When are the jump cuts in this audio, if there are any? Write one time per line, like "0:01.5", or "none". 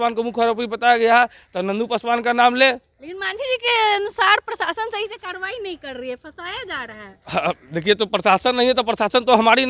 none

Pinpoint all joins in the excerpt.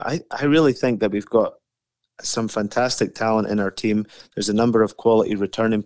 none

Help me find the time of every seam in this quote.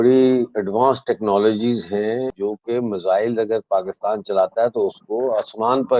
0:02.3

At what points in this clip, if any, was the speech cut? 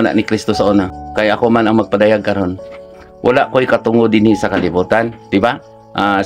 0:01.0

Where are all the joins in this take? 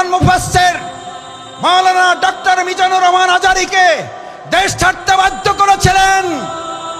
none

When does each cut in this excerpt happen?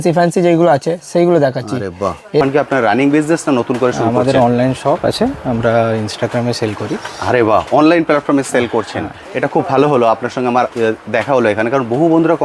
0:02.4

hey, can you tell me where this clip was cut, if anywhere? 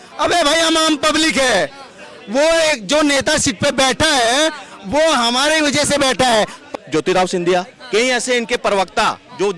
0:06.6

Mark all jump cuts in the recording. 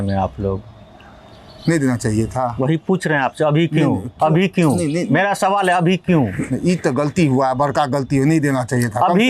none

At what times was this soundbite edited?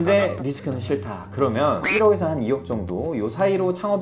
0:01.9

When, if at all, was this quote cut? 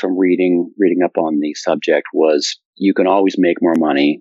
none

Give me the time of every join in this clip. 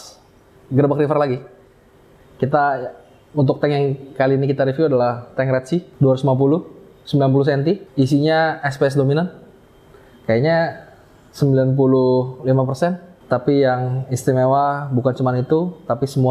none

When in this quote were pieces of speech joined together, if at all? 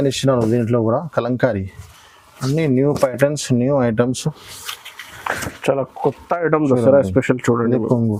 none

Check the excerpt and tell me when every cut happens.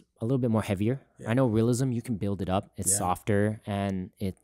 none

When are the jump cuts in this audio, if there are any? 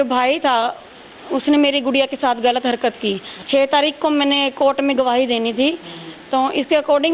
0:03.3

